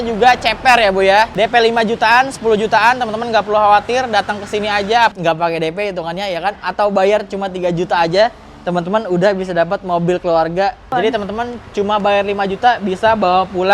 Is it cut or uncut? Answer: cut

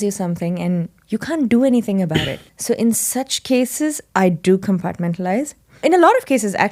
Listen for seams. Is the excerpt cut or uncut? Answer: uncut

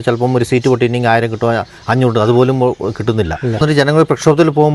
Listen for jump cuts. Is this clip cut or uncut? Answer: cut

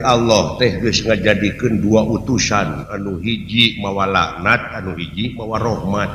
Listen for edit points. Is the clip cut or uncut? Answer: uncut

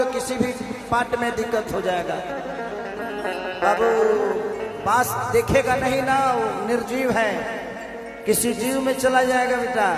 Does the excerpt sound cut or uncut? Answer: uncut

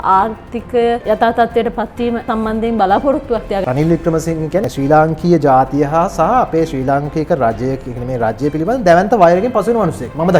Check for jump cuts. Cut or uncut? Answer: cut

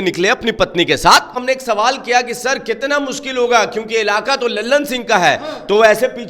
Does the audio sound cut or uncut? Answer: cut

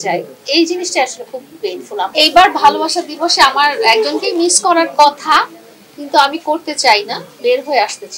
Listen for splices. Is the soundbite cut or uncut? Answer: cut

